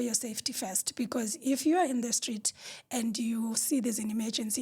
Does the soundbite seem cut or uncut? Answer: uncut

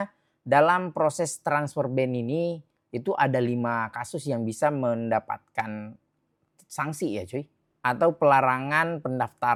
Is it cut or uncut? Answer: uncut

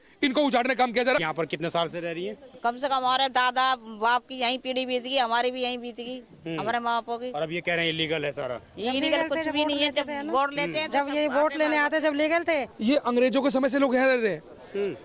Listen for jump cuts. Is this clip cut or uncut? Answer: cut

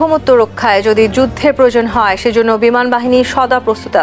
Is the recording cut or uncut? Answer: uncut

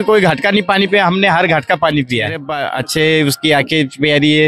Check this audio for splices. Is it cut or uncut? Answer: cut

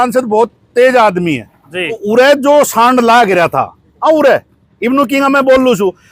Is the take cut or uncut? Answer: cut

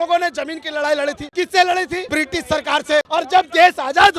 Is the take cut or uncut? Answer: cut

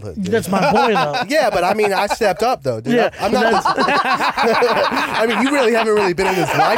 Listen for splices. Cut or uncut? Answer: uncut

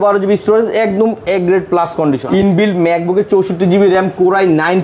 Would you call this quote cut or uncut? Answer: cut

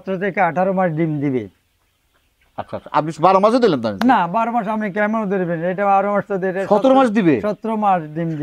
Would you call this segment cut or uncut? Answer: uncut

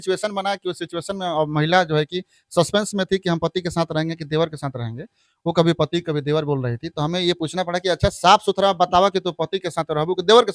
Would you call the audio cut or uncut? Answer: uncut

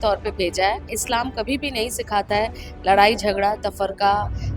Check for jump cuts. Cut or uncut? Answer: cut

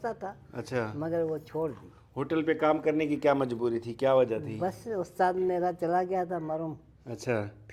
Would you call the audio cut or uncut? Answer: uncut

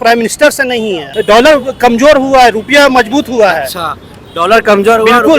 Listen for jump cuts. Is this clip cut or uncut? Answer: cut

